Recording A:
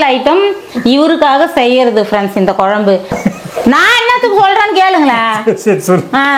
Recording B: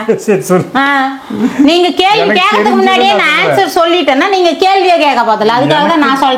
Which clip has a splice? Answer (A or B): A